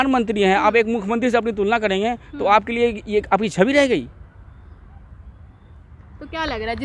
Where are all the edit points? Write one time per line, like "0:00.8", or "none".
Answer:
none